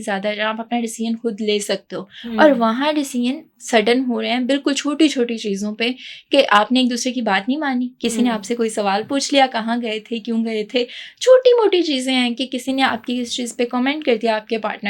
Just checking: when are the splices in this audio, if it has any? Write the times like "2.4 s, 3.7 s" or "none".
none